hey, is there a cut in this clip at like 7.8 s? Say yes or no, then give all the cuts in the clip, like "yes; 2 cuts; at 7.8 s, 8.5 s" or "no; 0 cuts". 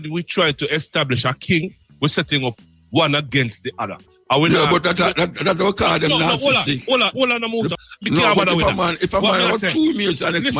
yes; 1 cut; at 7.8 s